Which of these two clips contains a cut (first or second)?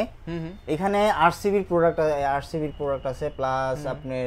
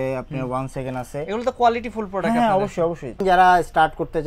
second